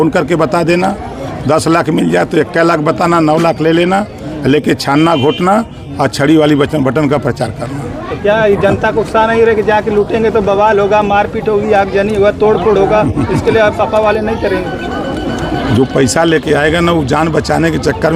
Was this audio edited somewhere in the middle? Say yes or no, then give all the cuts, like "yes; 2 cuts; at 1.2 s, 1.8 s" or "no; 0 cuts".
no; 0 cuts